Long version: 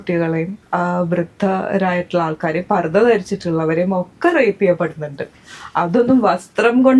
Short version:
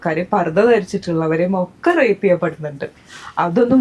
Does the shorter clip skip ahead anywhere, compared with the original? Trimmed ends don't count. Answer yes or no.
no